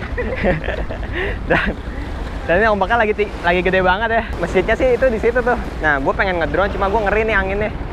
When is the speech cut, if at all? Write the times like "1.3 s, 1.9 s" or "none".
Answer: 4.3 s, 5.7 s